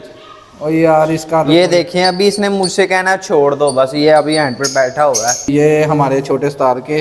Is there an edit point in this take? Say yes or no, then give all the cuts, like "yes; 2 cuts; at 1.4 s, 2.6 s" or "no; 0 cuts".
yes; 1 cut; at 5.5 s